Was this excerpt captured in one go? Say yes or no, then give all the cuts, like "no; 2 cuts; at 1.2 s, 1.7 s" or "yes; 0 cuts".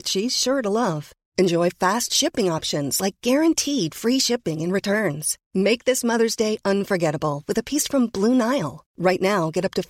yes; 0 cuts